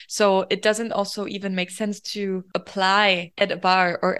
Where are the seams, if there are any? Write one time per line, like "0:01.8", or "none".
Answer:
0:02.5
0:03.3